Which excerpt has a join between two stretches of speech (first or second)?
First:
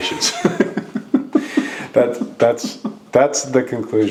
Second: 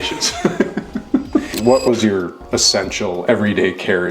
second